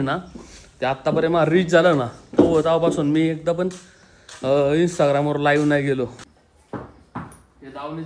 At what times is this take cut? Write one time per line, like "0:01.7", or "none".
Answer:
0:06.2